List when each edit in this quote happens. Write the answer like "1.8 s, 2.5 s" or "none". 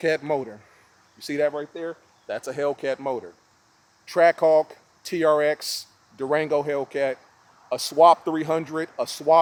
none